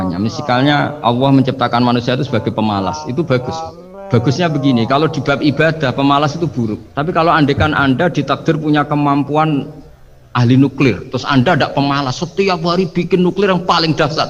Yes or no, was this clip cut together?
no